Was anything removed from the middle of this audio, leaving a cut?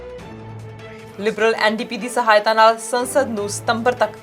yes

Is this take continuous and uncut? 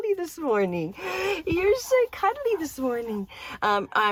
yes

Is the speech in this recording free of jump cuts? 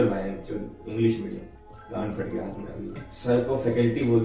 no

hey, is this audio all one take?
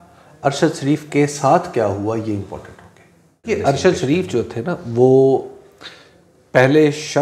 no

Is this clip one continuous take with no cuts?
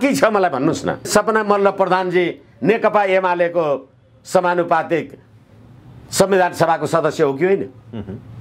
no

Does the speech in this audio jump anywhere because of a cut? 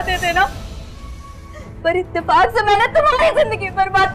no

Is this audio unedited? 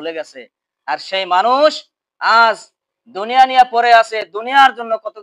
yes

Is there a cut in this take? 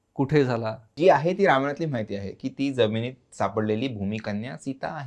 yes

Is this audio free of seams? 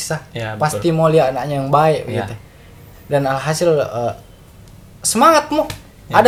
yes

